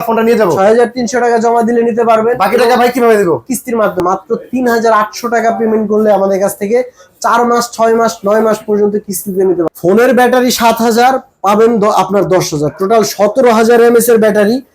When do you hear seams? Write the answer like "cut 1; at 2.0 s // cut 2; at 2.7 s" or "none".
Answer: cut 1; at 4.0 s // cut 2; at 9.7 s